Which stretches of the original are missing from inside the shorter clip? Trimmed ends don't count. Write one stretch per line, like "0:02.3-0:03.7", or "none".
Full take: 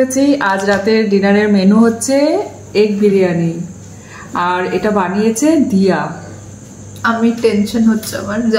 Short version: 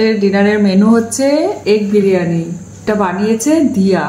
0:02.5-0:02.7
0:03.9-0:04.8